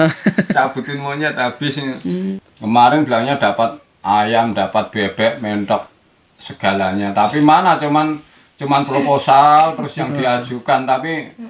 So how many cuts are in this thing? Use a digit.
1